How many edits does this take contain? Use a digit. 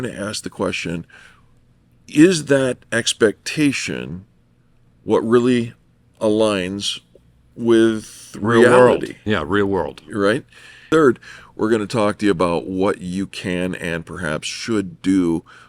0